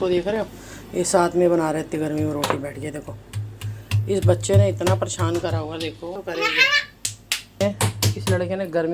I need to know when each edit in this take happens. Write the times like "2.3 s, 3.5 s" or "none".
none